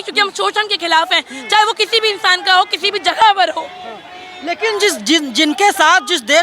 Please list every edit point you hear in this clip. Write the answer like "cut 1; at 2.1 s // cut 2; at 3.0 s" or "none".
none